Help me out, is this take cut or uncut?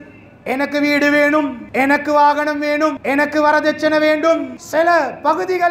cut